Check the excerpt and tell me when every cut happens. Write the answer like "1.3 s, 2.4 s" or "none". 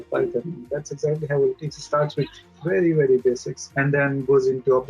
3.6 s